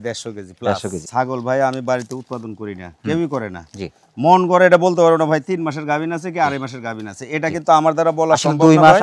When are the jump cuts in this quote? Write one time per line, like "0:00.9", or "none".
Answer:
0:01.0

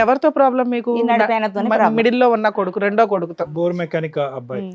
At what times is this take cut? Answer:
none

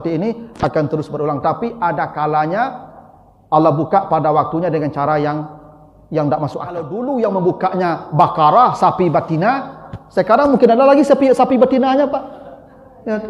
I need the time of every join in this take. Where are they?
0:06.9

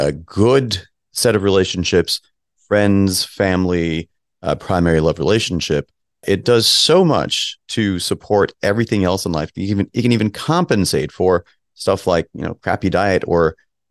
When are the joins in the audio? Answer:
none

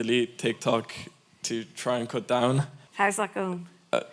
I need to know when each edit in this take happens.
0:02.8

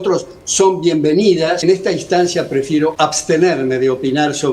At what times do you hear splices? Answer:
0:01.6
0:02.9

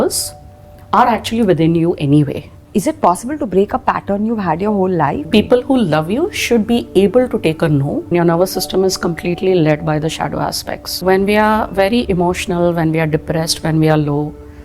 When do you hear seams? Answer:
0:02.6
0:05.2
0:08.1
0:11.0

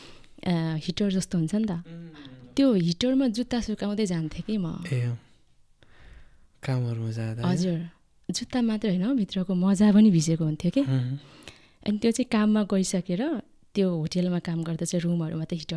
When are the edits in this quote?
none

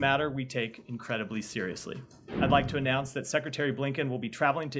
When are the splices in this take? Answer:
0:02.2

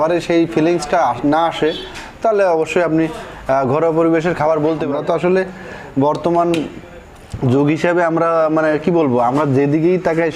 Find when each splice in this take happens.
0:04.9

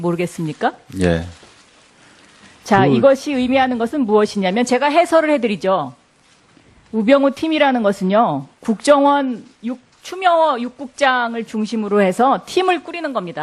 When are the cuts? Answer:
0:10.0

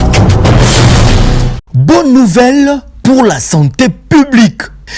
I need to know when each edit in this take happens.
0:01.7

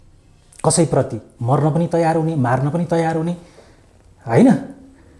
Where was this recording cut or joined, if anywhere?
none

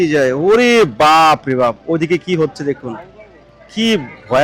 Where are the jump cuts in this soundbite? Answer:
none

